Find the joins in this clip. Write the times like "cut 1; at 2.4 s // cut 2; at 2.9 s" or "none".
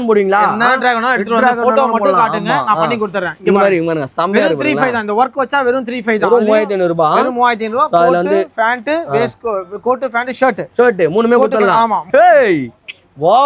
cut 1; at 12.1 s